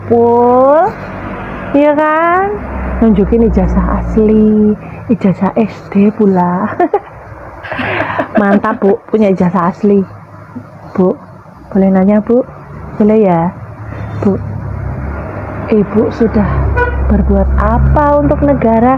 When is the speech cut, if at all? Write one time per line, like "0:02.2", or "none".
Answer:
none